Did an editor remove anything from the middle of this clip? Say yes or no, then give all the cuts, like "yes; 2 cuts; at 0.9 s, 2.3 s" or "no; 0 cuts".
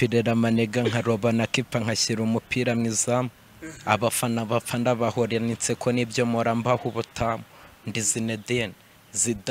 no; 0 cuts